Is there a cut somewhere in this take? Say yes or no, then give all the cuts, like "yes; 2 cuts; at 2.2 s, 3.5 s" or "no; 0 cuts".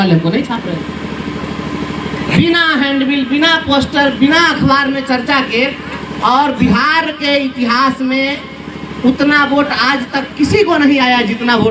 no; 0 cuts